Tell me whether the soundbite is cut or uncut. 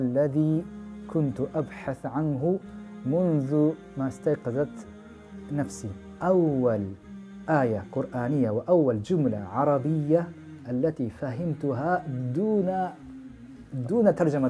cut